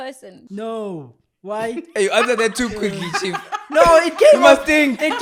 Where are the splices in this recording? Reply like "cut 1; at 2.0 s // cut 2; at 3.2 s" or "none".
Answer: none

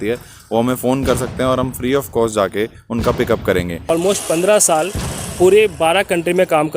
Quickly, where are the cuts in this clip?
cut 1; at 3.9 s

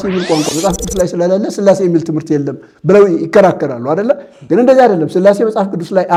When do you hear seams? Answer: none

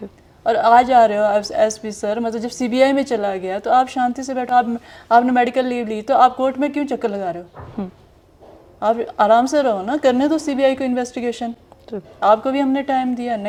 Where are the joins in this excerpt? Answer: none

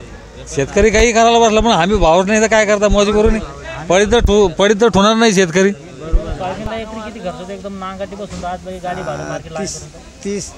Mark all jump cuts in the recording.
cut 1; at 6.3 s

